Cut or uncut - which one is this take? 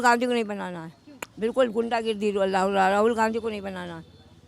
uncut